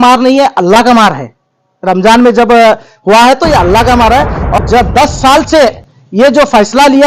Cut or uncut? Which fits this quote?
cut